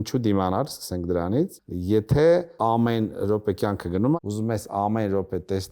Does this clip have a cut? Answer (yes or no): yes